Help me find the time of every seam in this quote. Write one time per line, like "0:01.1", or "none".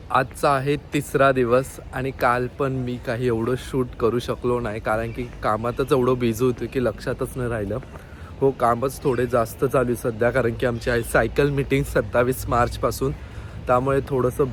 none